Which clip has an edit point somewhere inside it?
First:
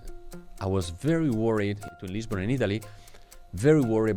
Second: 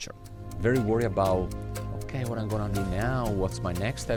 first; 1 cut; at 1.8 s

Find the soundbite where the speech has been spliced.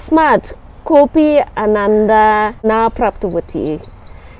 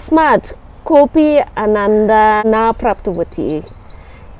second; 1 cut; at 2.4 s

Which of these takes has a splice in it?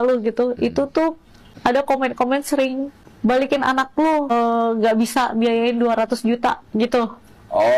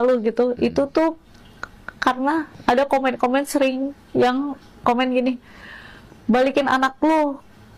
first; 3 cuts; at 1.5 s, 2.9 s, 4.3 s

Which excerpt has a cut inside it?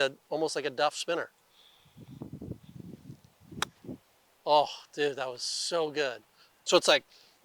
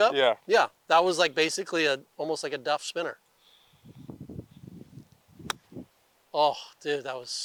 first; 1 cut; at 6.5 s

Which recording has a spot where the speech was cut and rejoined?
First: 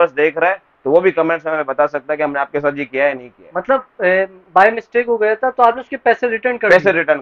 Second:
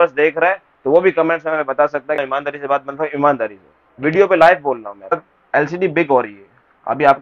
second; 2 cuts; at 2.2 s, 5.3 s

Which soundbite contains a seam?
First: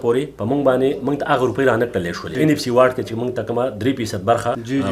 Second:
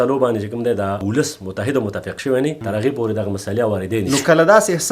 second; 2 cuts; at 1.0 s, 4.1 s

